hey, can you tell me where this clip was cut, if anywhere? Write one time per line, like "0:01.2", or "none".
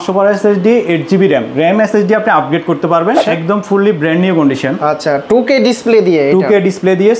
0:03.2